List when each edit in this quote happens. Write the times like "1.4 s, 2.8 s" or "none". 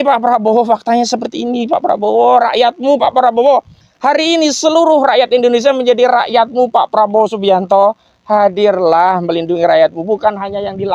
3.8 s